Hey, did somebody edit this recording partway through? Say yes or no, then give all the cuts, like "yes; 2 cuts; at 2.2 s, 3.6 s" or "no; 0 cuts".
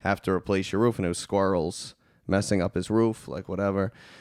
no; 0 cuts